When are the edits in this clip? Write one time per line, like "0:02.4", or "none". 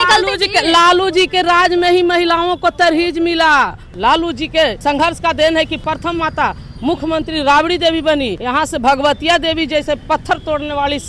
0:03.8
0:04.8
0:05.8
0:08.4

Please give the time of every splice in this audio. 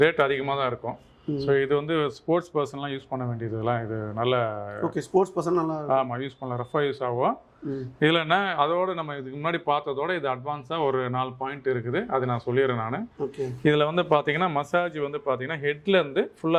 none

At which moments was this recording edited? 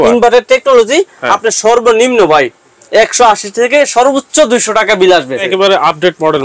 0:05.5

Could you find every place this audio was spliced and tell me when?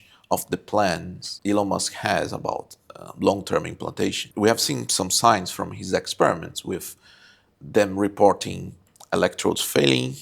0:01.2
0:04.2

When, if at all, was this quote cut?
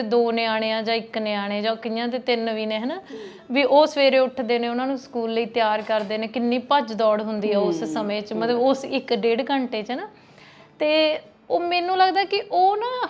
none

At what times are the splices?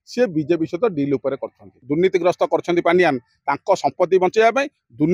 0:01.7

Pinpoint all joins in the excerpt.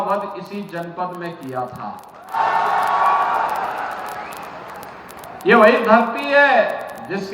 0:02.3

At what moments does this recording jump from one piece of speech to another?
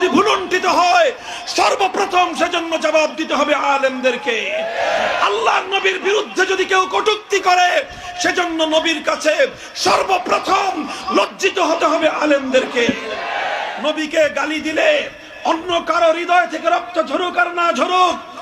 0:13.7

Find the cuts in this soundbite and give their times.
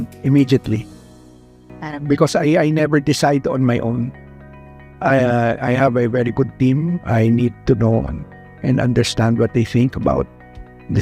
none

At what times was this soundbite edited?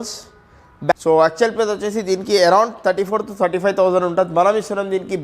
0:00.9

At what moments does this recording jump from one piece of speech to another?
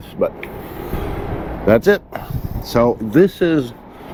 none

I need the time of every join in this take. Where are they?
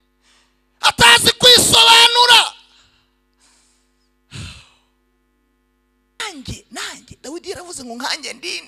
0:06.2

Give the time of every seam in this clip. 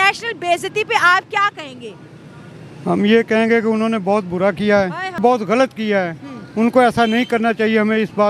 0:05.2

